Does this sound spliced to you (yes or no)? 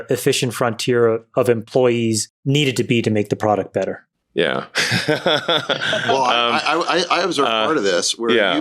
yes